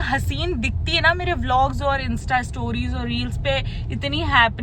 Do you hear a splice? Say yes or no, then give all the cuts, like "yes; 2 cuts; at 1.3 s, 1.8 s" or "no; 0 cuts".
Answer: no; 0 cuts